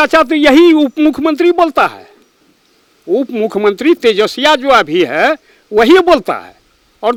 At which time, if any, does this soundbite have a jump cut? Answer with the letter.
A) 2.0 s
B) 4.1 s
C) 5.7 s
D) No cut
D